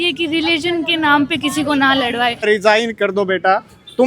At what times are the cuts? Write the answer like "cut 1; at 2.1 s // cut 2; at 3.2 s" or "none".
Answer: cut 1; at 2.4 s